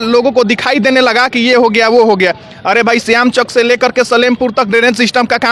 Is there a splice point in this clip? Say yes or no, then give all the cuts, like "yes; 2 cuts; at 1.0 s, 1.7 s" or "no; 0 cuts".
no; 0 cuts